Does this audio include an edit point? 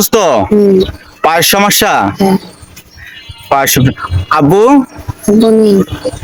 no; 0 cuts

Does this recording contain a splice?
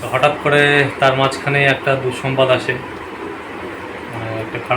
no; 0 cuts

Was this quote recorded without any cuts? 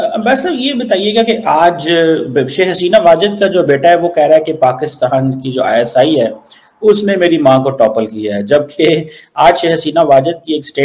yes; 0 cuts

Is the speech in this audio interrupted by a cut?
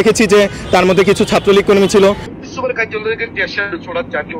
yes; 1 cut; at 2.3 s

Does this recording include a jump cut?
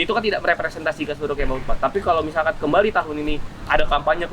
no; 0 cuts

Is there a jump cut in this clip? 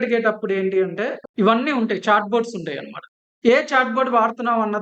yes; 1 cut; at 1.2 s

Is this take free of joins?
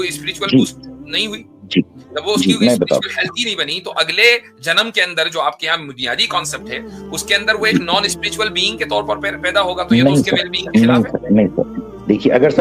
yes; 0 cuts

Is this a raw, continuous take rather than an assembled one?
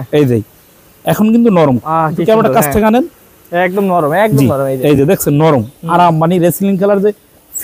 yes; 0 cuts

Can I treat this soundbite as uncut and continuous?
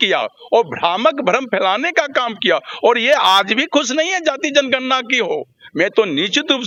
yes; 0 cuts

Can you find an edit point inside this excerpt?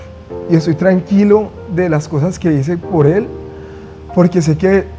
no; 0 cuts

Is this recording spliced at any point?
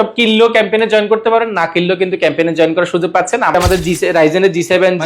yes; 1 cut; at 3.5 s

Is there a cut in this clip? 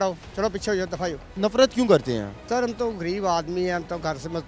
yes; 2 cuts; at 1.3 s, 2.4 s

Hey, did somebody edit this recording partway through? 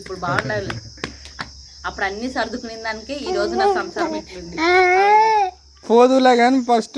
yes; 1 cut; at 5.9 s

